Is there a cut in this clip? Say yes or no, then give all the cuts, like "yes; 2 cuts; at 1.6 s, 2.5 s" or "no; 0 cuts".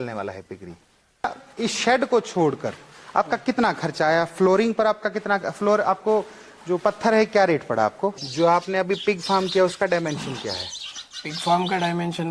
yes; 2 cuts; at 1.4 s, 8.2 s